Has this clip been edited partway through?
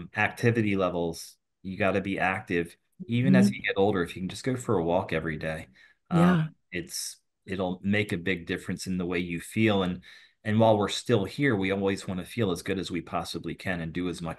no; 0 cuts

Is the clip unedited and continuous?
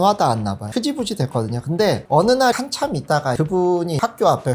no; 1 cut; at 2.6 s

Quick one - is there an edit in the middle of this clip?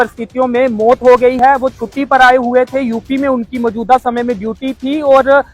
no; 0 cuts

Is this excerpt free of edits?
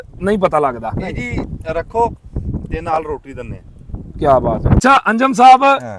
no; 1 cut; at 4.8 s

